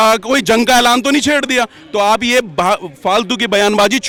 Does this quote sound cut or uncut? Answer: uncut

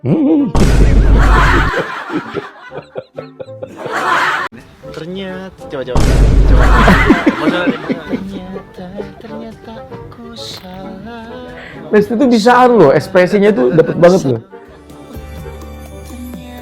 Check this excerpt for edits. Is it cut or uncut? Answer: cut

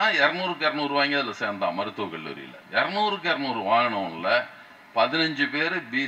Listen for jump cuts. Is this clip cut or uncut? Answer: cut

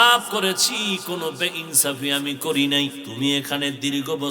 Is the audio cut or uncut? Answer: cut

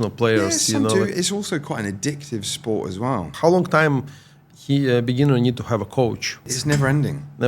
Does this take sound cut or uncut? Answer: cut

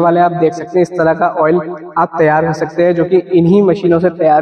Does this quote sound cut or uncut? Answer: uncut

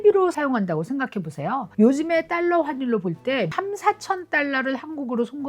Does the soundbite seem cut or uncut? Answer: cut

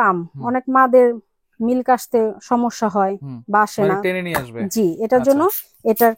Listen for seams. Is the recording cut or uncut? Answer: uncut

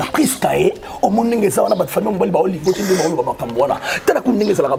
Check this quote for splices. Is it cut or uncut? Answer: uncut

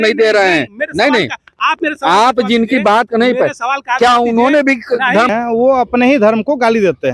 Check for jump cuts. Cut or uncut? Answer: cut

